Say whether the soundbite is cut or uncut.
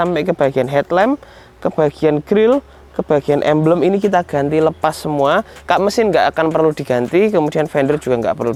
uncut